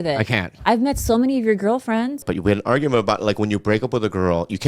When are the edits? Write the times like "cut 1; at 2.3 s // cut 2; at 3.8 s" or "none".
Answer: cut 1; at 2.3 s